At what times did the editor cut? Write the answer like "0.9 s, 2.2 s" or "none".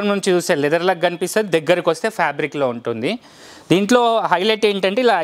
none